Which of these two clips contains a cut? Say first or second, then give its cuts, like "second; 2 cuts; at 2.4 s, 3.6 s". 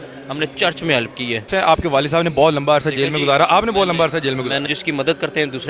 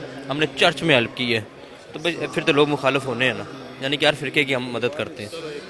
first; 2 cuts; at 1.5 s, 4.6 s